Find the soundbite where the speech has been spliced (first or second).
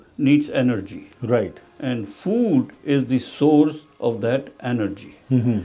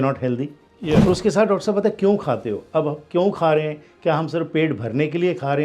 second